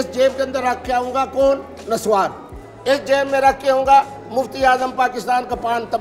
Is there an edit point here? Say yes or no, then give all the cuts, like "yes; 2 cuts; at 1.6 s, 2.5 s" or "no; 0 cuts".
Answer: no; 0 cuts